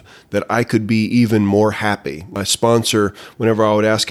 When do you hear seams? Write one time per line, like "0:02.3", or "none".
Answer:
0:02.3